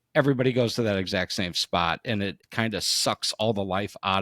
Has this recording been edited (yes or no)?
yes